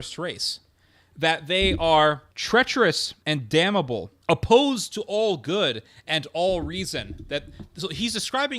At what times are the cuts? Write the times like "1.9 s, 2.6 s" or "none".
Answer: 2.3 s, 3.1 s, 4.1 s